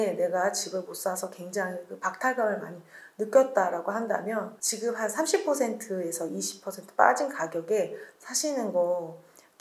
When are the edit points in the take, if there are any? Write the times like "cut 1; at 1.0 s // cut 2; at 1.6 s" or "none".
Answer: cut 1; at 4.6 s